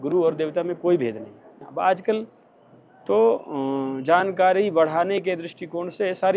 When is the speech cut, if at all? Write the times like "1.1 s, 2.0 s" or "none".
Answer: 1.5 s